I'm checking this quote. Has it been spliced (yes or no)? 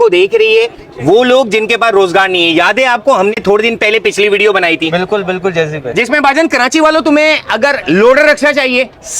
no